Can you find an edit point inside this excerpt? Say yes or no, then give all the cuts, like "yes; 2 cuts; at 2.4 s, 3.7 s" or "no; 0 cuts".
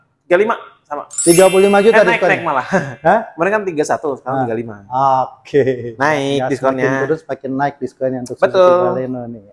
no; 0 cuts